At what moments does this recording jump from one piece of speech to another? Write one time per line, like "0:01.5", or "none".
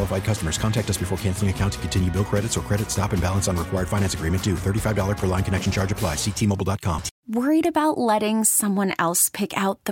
0:07.1